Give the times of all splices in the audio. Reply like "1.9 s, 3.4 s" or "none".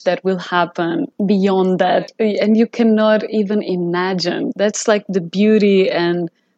1.1 s, 2.1 s